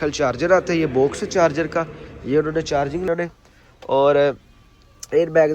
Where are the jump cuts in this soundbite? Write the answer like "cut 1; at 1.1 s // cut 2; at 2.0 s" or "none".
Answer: cut 1; at 3.1 s